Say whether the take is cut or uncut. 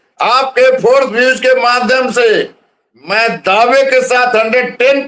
uncut